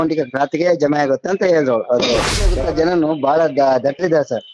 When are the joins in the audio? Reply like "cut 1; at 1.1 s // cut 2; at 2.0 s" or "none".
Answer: cut 1; at 2.5 s